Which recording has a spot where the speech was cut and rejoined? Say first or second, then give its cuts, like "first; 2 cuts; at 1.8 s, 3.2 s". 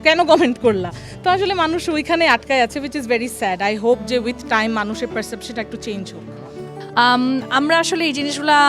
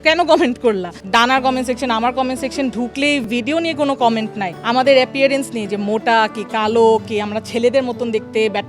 second; 3 cuts; at 0.9 s, 3.3 s, 4.5 s